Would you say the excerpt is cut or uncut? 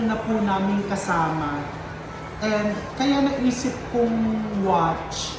uncut